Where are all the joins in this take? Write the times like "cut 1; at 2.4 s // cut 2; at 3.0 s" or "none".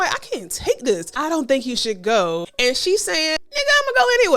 cut 1; at 1.1 s // cut 2; at 2.5 s // cut 3; at 3.4 s

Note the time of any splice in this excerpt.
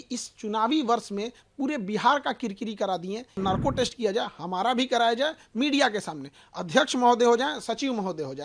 cut 1; at 3.4 s

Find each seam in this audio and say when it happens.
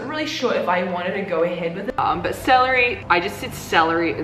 cut 1; at 2.0 s

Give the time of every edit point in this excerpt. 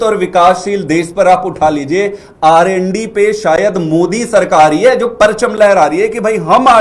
none

